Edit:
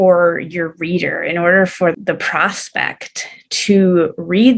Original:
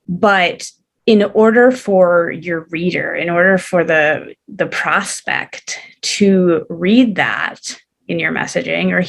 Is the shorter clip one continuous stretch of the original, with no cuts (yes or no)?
no